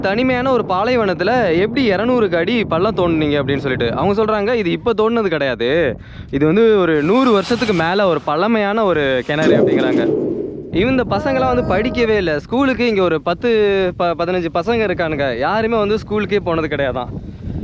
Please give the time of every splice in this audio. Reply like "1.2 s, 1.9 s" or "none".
10.7 s